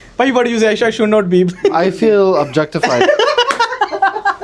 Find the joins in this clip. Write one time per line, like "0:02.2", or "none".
none